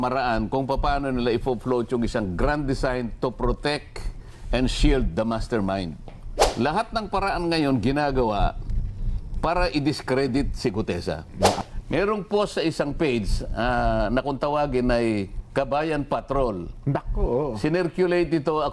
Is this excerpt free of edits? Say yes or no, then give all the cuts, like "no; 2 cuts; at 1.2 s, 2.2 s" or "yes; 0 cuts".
no; 2 cuts; at 6.5 s, 11.6 s